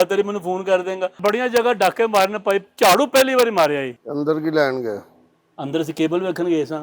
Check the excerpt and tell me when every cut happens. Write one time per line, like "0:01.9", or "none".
0:01.2
0:03.9